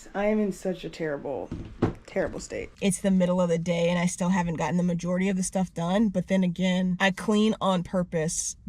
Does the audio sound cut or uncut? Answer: cut